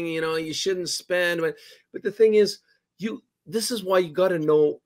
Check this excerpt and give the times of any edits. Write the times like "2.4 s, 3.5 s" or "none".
none

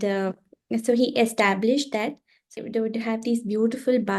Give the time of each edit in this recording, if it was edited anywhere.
2.6 s

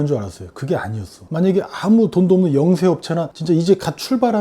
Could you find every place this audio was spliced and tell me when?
1.3 s

